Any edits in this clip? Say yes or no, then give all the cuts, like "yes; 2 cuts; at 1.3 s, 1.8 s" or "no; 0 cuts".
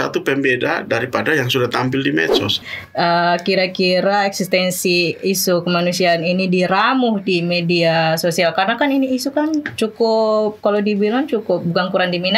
yes; 1 cut; at 2.6 s